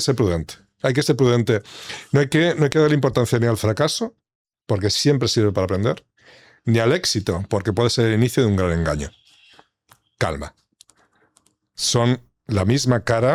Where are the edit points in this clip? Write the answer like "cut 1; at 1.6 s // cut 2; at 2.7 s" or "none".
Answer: none